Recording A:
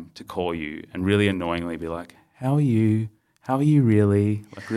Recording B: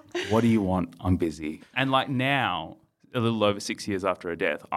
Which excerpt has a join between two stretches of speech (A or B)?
B